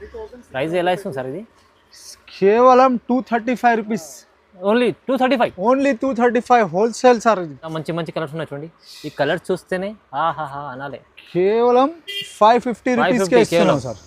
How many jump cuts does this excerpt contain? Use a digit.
1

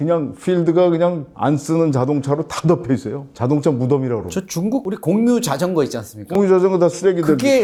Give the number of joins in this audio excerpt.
0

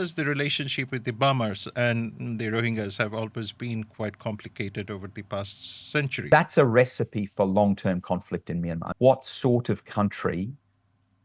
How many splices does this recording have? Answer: 2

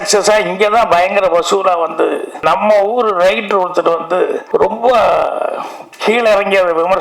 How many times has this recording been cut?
2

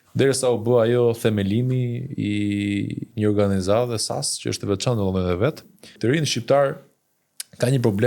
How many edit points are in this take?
1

